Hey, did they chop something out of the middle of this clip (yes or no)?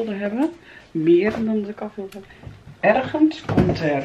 yes